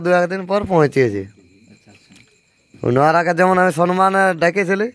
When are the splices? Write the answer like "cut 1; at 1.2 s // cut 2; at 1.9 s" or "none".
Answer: none